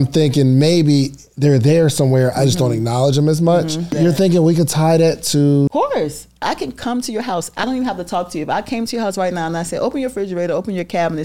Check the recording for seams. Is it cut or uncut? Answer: cut